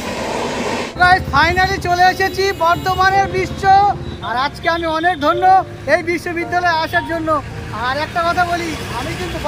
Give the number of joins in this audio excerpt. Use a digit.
1